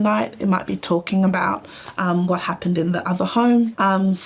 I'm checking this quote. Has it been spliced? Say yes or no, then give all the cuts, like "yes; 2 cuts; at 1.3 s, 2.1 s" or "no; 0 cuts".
no; 0 cuts